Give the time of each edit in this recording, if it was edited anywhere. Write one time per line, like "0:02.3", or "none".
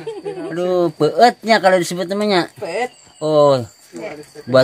none

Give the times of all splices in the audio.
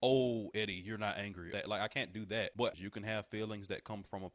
0:01.5
0:02.7

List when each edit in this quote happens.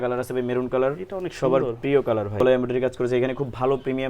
0:02.4

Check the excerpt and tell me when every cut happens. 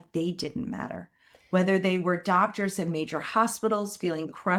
none

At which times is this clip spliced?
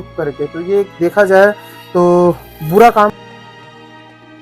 0:03.1

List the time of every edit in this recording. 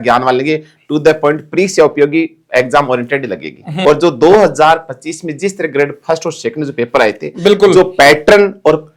none

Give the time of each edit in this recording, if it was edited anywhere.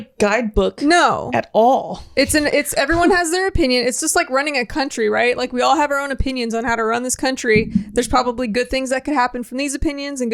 none

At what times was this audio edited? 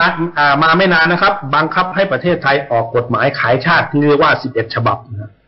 none

